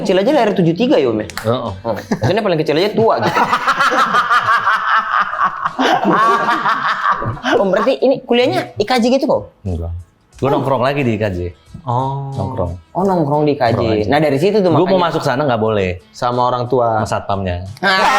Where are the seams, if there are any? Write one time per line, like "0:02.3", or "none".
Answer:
0:07.5

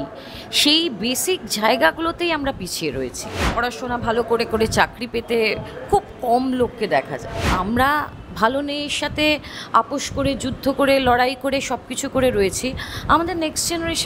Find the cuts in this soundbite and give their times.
0:03.5
0:07.5

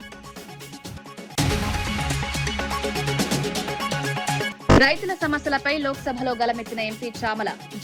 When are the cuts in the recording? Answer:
0:01.3
0:04.5

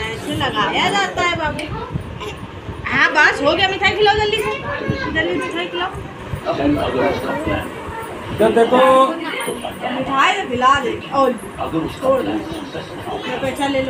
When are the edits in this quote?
none

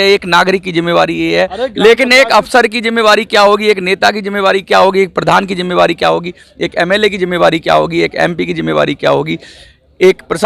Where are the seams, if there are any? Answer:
none

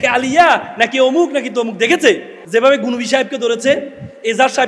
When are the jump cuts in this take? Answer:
0:02.3

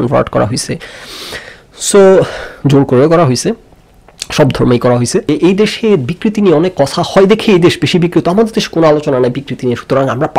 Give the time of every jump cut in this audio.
0:05.3

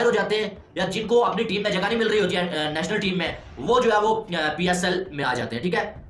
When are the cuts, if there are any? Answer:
none

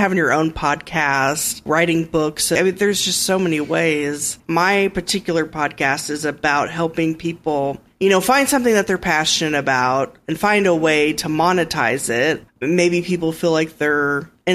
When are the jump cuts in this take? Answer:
0:01.6
0:02.6
0:04.3
0:07.8
0:12.4

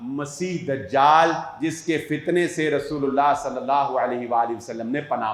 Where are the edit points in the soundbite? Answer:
none

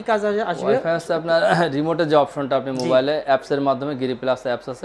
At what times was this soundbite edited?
none

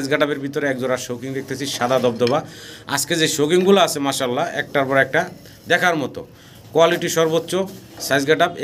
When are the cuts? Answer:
none

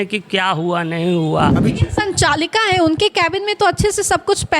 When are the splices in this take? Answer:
0:01.5

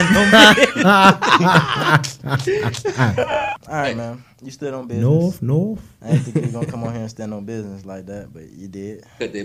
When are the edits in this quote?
0:03.6

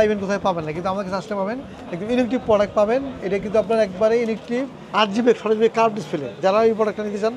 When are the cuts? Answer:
0:04.9

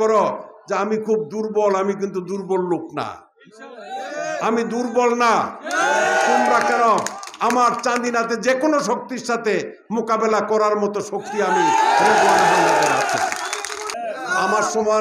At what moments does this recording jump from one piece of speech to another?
0:13.9

